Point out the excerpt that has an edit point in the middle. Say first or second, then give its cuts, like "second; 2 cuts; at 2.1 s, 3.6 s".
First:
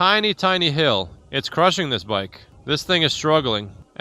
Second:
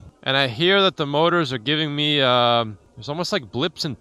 first; 2 cuts; at 1.2 s, 2.5 s